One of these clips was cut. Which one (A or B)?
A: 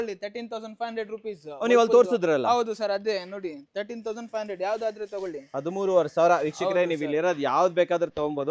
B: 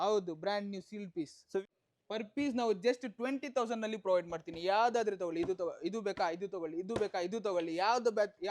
B